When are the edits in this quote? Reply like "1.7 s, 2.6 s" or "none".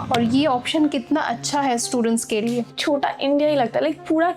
2.8 s